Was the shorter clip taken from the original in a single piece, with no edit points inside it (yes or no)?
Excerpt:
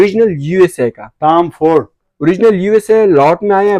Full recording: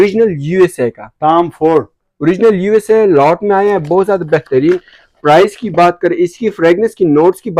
yes